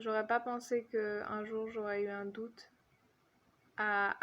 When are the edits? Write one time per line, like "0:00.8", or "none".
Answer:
none

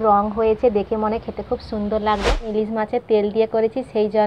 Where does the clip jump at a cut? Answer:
0:02.5

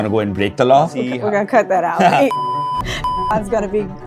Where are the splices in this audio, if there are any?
0:00.9

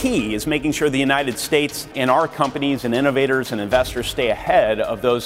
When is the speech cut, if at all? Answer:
0:01.9

